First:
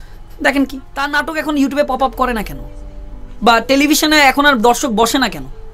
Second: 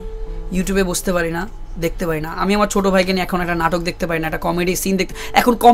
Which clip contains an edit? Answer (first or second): first